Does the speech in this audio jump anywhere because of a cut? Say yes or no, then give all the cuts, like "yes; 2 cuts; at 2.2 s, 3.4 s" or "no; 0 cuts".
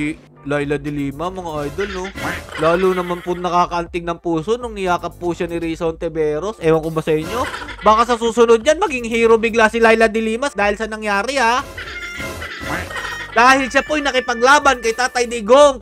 no; 0 cuts